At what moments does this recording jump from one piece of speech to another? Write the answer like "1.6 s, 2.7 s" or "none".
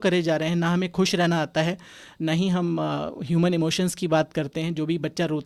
none